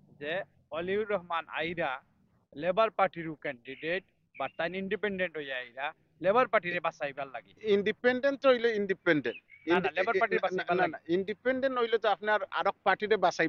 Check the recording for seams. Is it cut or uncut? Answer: uncut